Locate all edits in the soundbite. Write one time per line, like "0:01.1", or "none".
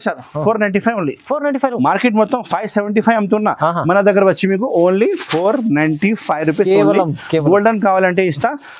none